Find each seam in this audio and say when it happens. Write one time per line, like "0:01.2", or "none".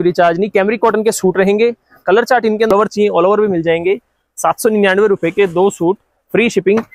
0:02.7

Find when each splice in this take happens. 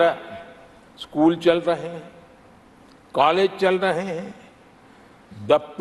none

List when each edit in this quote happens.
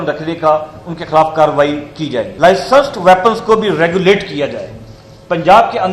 0:02.2

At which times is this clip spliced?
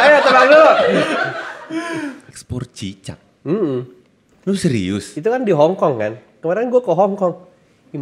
0:02.5

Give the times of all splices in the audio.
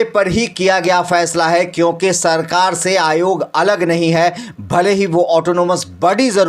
none

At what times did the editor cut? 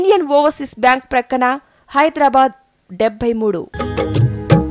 0:03.7

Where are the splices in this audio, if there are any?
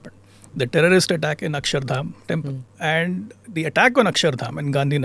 0:02.7
0:03.4

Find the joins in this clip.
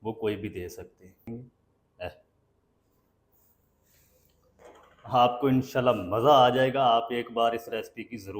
0:01.3

